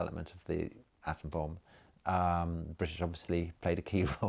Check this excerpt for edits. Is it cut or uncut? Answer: uncut